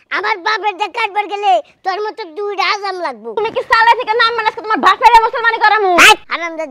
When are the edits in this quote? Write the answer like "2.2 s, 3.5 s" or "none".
3.4 s